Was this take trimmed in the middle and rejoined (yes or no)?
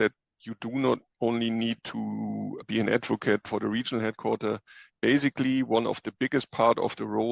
yes